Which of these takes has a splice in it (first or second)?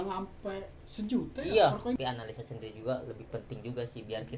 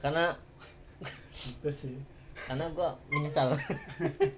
first